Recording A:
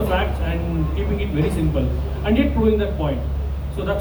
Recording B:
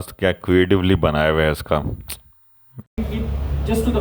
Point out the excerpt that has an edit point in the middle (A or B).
B